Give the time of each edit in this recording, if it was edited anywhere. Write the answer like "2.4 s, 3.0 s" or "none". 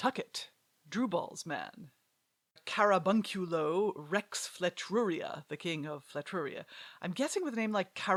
none

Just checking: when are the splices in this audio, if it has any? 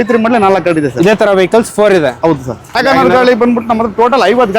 2.7 s

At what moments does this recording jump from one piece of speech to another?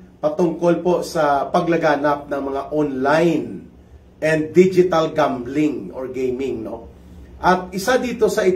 none

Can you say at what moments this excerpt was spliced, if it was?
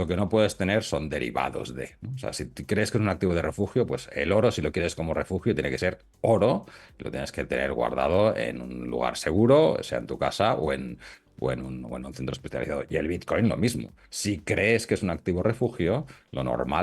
none

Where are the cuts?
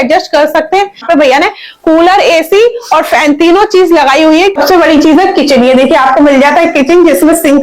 1.0 s, 4.5 s

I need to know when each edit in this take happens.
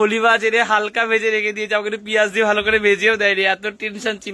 none

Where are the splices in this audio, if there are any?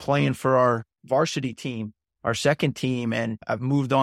none

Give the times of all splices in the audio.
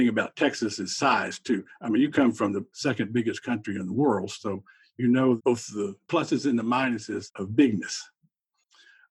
none

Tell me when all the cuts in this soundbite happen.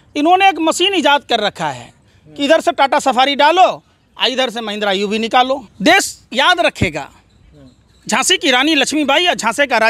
5.7 s

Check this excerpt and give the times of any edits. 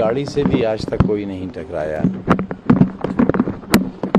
none

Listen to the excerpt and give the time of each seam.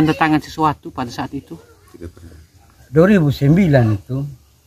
2.7 s

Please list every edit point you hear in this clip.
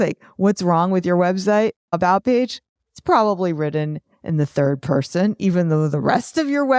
2.0 s

